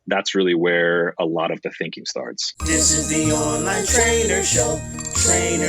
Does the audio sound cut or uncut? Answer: cut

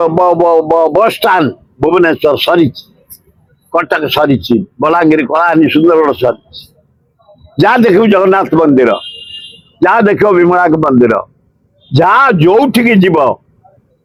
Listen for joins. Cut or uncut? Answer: uncut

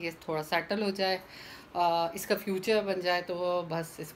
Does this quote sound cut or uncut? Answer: uncut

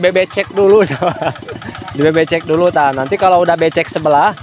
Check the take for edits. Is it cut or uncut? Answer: uncut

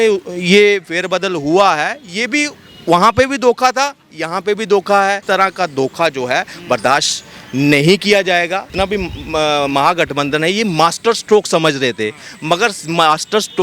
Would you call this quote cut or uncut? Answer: cut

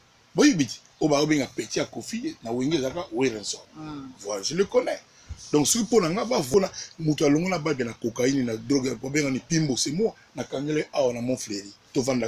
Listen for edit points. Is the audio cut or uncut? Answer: cut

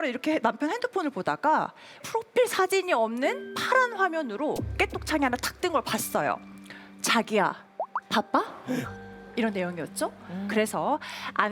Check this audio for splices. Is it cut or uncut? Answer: uncut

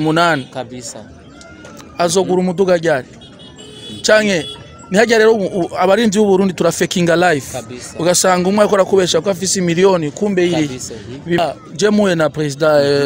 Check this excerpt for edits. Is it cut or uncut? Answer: cut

